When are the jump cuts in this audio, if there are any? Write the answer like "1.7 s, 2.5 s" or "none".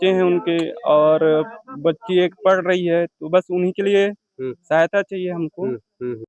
none